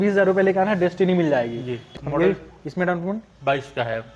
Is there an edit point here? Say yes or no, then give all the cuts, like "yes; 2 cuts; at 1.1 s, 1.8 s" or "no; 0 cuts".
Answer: yes; 1 cut; at 1.9 s